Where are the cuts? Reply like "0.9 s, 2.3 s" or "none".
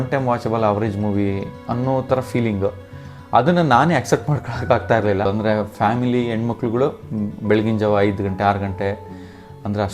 5.2 s